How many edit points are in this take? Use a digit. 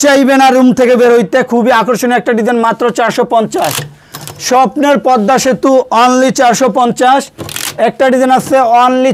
0